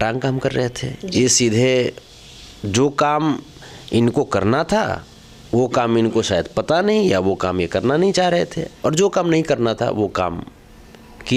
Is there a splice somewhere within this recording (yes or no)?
no